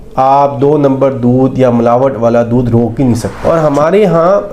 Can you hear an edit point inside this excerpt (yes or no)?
yes